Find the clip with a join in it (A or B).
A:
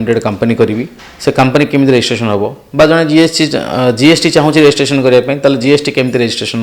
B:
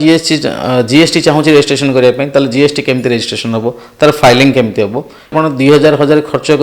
B